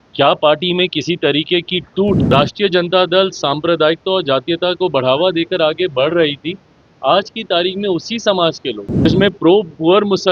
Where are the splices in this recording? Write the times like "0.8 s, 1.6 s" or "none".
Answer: 2.2 s, 9.0 s